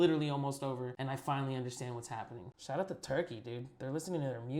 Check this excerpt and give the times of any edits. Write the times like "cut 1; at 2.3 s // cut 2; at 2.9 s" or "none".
cut 1; at 2.4 s